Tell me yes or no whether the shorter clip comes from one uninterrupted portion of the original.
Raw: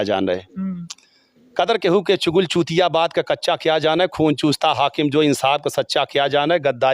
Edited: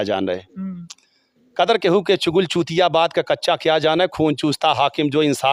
yes